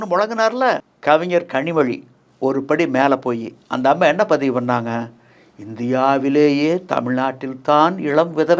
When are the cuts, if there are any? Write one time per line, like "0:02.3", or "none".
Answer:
0:00.9